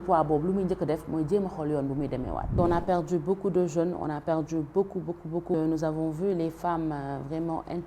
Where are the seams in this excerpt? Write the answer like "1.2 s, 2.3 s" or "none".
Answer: 2.5 s, 5.5 s